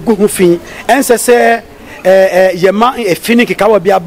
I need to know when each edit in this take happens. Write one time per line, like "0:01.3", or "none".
none